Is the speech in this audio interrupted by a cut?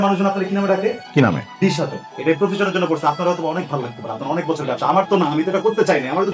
yes; 2 cuts; at 1.0 s, 2.0 s

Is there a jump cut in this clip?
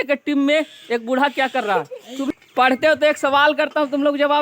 yes; 1 cut; at 2.2 s

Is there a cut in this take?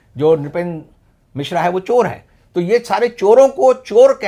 no; 0 cuts

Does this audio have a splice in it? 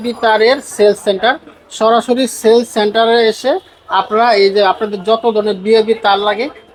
no; 0 cuts

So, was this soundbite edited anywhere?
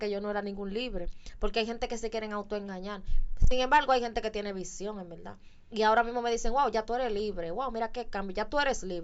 no; 0 cuts

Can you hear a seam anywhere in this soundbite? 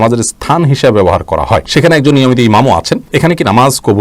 yes; 2 cuts; at 1.7 s, 3.0 s

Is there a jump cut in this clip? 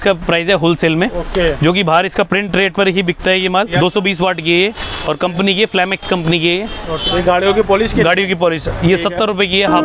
yes; 2 cuts; at 3.7 s, 7.0 s

